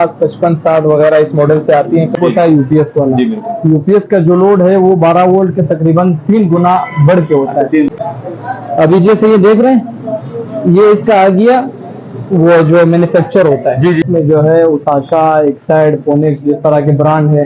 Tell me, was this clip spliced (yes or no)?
yes